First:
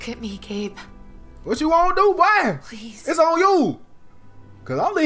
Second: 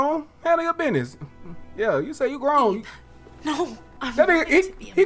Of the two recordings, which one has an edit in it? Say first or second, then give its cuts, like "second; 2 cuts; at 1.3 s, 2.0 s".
second; 1 cut; at 4.0 s